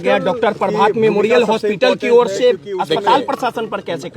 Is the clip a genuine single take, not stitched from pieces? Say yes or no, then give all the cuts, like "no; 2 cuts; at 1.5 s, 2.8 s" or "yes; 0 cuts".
yes; 0 cuts